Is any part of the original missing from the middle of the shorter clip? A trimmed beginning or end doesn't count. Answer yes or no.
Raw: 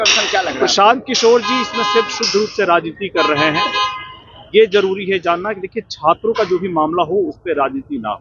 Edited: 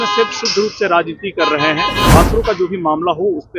yes